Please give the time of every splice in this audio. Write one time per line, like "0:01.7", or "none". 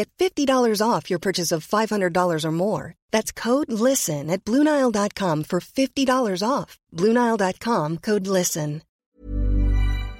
0:09.0